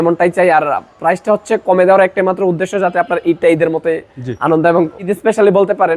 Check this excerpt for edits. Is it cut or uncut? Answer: cut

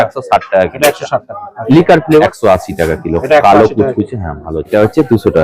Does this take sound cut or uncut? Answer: cut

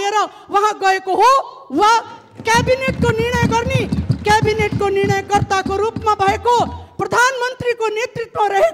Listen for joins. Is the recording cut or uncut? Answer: uncut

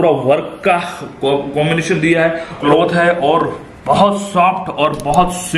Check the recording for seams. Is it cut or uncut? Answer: cut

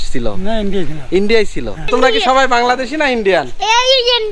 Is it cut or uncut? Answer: cut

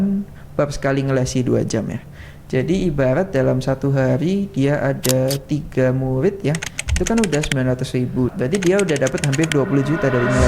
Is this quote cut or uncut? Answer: cut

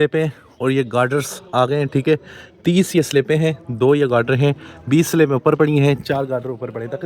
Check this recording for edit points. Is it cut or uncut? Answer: uncut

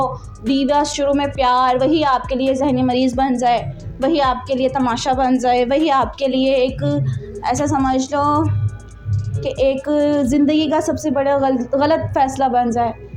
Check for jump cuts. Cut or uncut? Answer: uncut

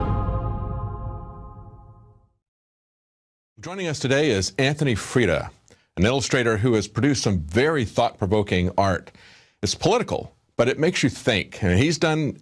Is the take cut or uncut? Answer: uncut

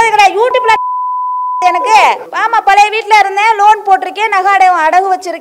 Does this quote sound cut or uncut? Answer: cut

